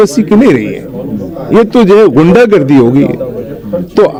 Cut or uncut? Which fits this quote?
uncut